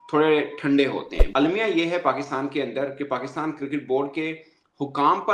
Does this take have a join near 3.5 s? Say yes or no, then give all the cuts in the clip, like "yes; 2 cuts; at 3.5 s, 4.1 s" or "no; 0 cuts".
no; 1 cut; at 1.1 s